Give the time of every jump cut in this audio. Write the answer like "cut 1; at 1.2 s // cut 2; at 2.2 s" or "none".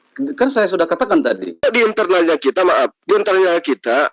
cut 1; at 1.6 s